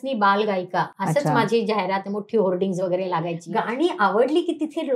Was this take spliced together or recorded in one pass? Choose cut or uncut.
cut